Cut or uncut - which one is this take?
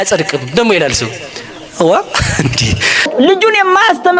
cut